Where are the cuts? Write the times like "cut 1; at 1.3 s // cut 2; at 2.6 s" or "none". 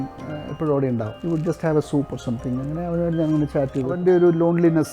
cut 1; at 1.1 s // cut 2; at 3.9 s